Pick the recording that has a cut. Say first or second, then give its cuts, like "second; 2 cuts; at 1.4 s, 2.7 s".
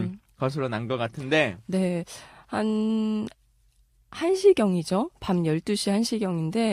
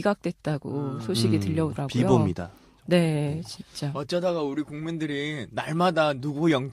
first; 1 cut; at 1.4 s